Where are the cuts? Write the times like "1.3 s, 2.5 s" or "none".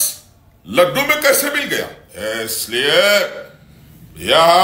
2.0 s